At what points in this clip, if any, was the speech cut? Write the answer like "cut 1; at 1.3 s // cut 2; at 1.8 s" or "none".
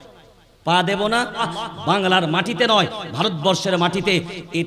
cut 1; at 1.5 s